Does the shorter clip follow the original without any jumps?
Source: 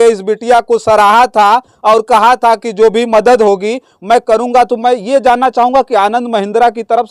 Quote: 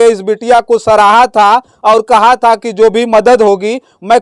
yes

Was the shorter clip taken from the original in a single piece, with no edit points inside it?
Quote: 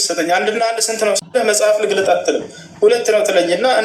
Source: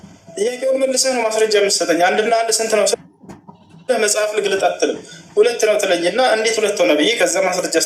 no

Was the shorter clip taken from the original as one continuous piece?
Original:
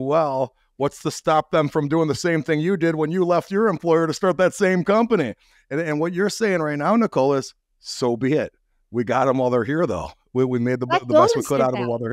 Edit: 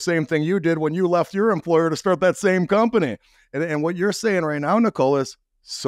yes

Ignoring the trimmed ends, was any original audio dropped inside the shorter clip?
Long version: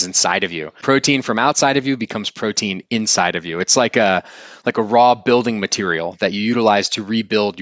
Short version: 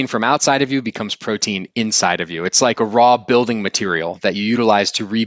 yes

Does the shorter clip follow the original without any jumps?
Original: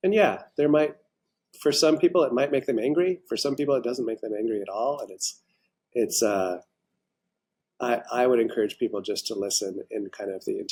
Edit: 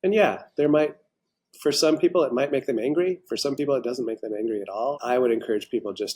no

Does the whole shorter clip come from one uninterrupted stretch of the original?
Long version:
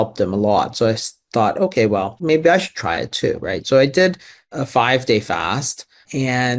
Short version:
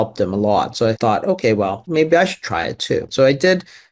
no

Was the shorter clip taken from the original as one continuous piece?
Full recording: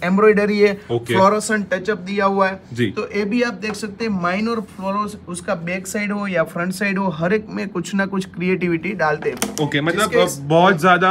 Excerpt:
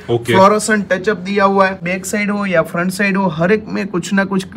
no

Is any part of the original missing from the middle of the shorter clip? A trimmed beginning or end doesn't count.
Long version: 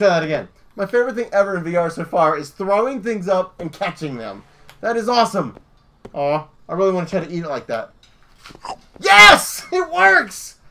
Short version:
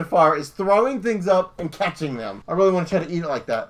yes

